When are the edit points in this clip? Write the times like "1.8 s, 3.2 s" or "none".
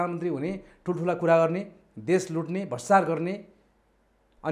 none